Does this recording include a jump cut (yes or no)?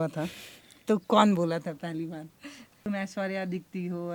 yes